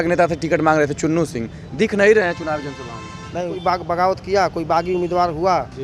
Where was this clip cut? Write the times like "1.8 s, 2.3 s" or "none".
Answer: 3.6 s

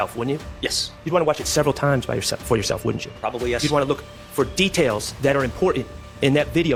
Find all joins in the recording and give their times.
none

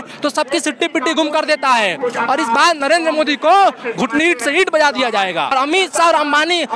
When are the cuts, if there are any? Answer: 5.5 s

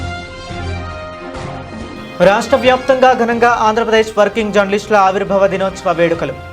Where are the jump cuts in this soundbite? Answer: 1.5 s

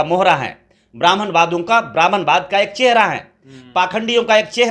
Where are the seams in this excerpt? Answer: none

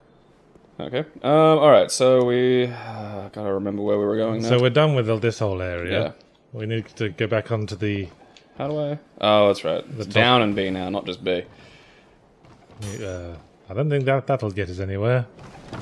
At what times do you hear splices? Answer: 8.8 s

